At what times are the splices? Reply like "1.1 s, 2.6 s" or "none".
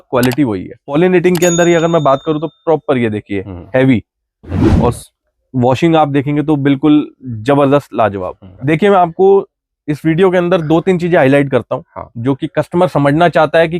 0.9 s, 8.5 s